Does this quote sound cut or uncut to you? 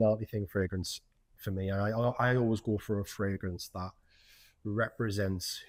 uncut